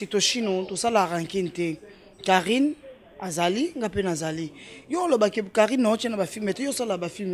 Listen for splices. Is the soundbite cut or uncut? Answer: uncut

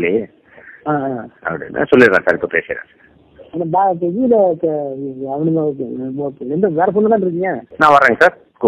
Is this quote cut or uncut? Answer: cut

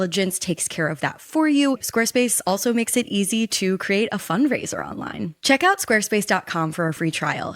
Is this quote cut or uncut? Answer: cut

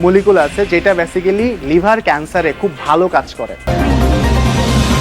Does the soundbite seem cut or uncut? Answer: cut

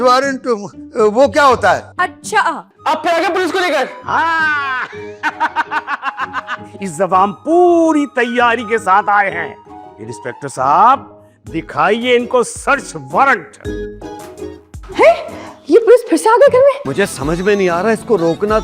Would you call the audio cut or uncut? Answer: cut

